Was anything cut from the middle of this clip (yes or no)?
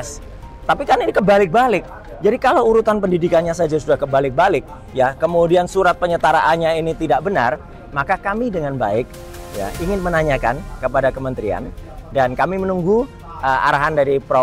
no